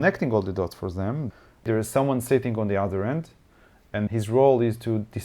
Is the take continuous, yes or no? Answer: no